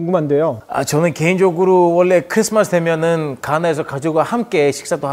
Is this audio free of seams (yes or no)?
yes